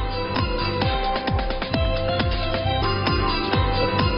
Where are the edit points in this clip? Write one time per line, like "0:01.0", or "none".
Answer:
0:02.8